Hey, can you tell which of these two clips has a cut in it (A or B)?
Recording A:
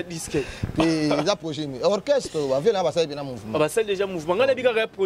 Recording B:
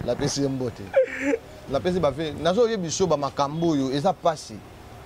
B